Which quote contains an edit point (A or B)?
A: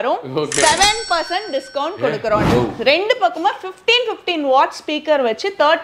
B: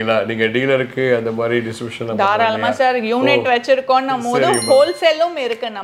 A